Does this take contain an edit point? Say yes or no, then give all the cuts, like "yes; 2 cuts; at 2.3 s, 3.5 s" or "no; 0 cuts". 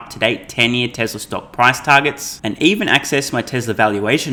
no; 0 cuts